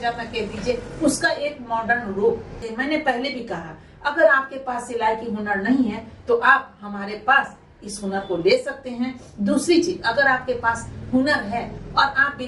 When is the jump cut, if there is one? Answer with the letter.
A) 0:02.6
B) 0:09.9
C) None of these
A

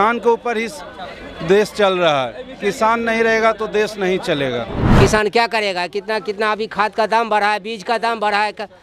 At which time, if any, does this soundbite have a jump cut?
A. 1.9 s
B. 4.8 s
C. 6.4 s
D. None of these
B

